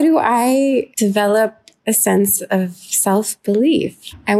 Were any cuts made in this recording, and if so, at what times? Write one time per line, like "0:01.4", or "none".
0:00.9